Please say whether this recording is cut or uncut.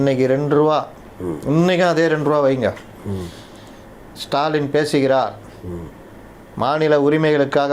uncut